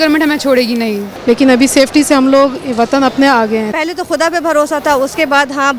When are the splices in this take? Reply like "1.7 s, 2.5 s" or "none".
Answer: 1.1 s, 3.7 s

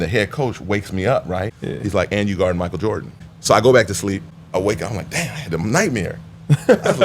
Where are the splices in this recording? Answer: 1.6 s, 3.3 s, 4.3 s

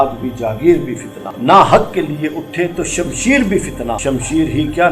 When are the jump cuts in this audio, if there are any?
1.2 s, 4.0 s

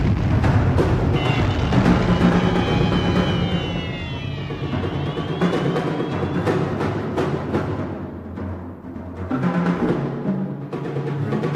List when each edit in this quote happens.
2.2 s

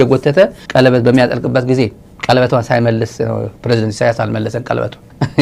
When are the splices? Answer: none

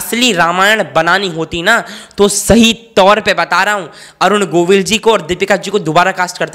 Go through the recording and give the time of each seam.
none

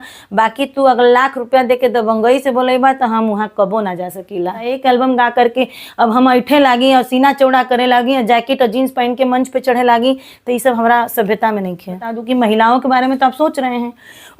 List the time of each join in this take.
4.7 s, 12.1 s

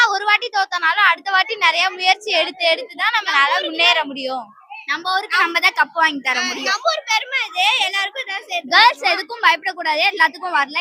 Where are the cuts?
none

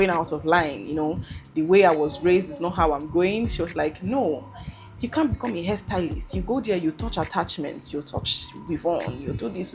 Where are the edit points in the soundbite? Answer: none

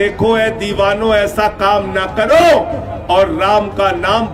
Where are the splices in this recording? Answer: none

